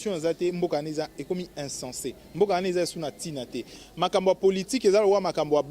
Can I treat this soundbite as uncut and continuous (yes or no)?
no